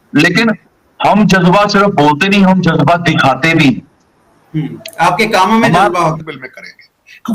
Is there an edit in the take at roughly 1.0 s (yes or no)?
no